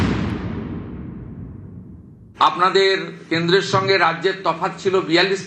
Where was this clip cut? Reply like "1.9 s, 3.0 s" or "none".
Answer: 2.3 s